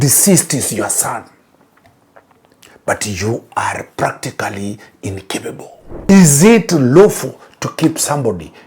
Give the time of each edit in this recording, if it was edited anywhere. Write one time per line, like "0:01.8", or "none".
0:05.9